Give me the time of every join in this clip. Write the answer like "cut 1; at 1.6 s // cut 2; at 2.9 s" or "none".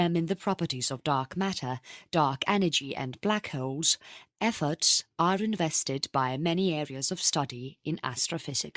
cut 1; at 7.0 s